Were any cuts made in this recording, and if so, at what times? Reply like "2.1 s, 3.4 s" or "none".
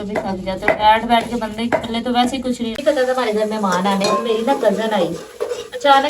2.7 s